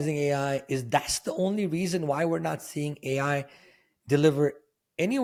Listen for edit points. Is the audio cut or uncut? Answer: uncut